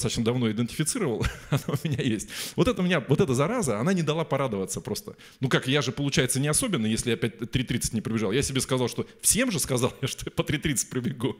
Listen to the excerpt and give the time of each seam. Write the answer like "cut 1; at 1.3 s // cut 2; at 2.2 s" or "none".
none